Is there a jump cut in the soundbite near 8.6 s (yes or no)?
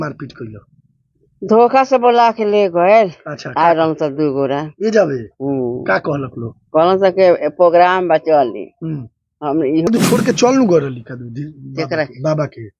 no